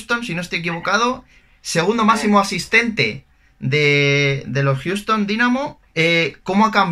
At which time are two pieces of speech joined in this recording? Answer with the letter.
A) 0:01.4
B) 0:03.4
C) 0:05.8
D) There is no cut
C